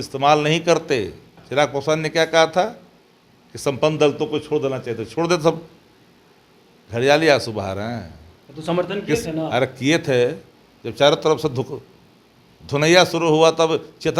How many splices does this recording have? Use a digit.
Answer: 1